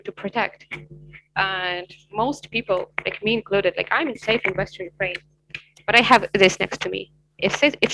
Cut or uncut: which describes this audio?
uncut